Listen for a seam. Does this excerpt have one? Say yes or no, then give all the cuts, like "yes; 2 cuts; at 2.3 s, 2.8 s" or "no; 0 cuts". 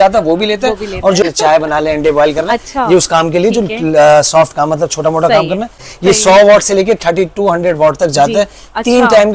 yes; 2 cuts; at 1.2 s, 5.9 s